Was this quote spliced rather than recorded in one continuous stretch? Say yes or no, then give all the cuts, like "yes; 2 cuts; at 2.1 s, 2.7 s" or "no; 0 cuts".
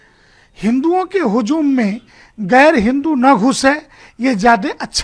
no; 0 cuts